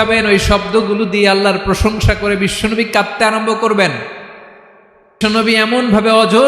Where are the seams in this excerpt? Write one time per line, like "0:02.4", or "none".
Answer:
0:05.1